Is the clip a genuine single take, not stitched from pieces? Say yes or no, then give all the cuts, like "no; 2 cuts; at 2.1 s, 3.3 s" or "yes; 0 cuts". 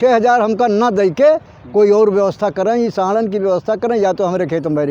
yes; 0 cuts